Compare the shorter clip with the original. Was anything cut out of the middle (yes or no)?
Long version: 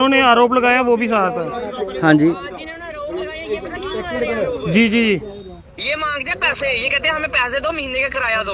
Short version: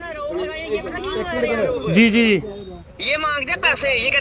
no